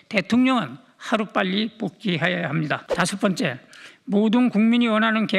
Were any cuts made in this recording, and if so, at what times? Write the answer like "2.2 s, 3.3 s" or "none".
2.9 s